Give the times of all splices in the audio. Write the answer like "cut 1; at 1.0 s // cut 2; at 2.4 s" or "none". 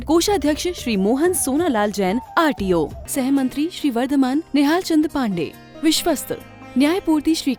none